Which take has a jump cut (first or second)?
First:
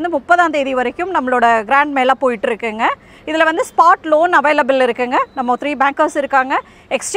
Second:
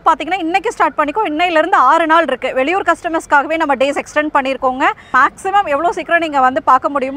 second